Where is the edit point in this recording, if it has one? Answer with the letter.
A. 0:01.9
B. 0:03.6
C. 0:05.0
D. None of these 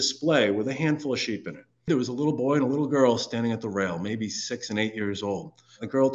A